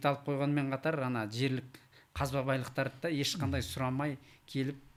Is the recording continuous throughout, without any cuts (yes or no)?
yes